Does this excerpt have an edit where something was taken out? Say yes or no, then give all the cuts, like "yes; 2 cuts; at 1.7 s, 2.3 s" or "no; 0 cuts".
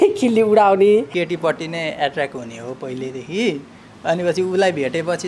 yes; 1 cut; at 1.1 s